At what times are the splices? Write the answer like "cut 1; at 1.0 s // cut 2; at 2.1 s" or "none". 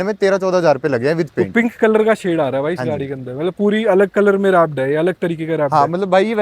cut 1; at 1.4 s